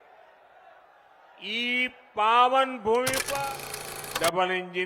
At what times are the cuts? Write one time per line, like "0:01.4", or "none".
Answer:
0:03.5